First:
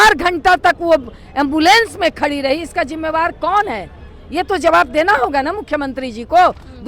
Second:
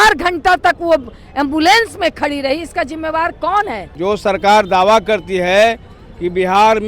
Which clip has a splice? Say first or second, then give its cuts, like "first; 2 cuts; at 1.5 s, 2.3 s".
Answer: second; 1 cut; at 3.9 s